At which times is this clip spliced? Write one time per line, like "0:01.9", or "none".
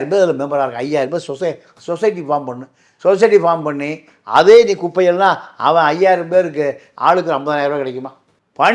none